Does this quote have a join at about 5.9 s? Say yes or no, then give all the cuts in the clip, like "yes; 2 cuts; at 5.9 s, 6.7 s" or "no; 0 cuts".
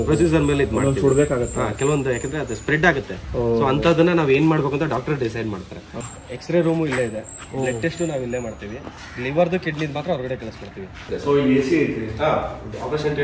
yes; 2 cuts; at 5.9 s, 11.1 s